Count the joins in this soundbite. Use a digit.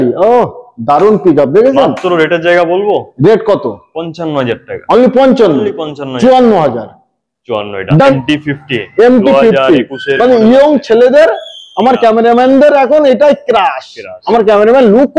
1